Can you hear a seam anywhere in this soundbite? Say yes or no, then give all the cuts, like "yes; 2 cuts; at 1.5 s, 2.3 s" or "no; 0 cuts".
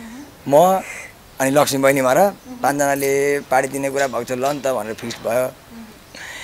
no; 0 cuts